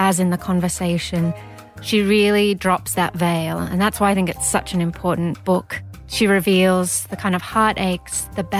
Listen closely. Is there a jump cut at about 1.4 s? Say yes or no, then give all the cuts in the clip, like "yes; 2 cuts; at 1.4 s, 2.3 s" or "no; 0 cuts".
no; 1 cut; at 5.8 s